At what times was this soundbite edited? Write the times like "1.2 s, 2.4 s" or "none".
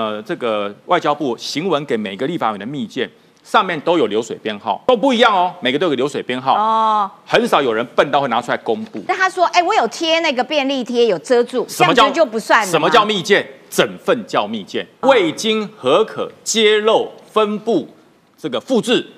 4.8 s, 9.1 s, 14.9 s